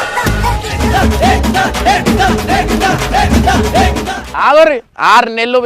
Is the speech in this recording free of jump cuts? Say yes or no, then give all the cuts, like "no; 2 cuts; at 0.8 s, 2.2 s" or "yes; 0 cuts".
no; 1 cut; at 4.2 s